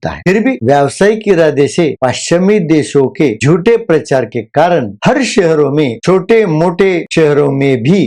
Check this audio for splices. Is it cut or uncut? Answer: uncut